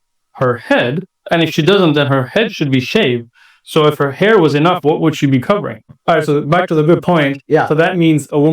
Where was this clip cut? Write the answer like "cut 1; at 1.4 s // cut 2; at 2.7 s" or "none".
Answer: cut 1; at 5.9 s